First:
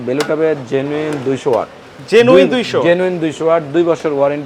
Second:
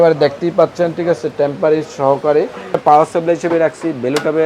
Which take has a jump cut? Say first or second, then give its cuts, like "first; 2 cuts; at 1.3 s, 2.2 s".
second; 1 cut; at 2.8 s